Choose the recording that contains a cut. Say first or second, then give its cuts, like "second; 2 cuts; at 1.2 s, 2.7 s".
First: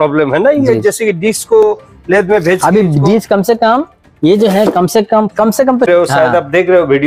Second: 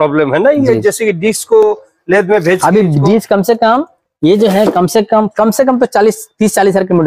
first; 1 cut; at 5.9 s